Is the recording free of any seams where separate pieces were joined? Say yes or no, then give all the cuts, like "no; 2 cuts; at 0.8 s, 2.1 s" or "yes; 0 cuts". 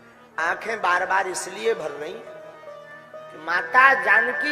yes; 0 cuts